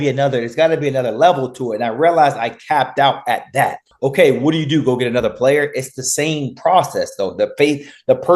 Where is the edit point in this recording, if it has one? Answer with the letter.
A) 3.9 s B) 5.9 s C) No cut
A